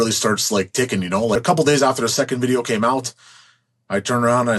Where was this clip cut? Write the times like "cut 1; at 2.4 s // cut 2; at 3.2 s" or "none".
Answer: cut 1; at 1.4 s

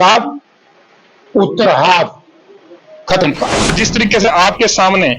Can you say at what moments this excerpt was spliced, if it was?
cut 1; at 3.7 s

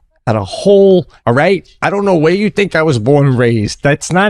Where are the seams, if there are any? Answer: cut 1; at 1.1 s

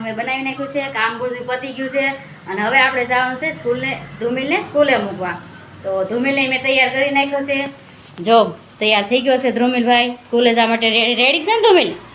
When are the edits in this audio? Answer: none

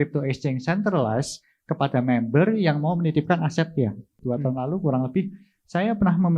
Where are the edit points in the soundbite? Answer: cut 1; at 4.1 s

